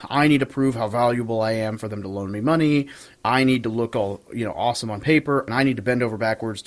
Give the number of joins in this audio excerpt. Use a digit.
1